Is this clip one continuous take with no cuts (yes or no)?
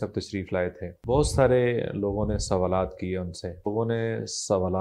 no